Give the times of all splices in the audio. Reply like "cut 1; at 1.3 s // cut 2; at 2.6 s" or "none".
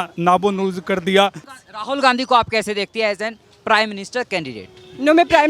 cut 1; at 1.6 s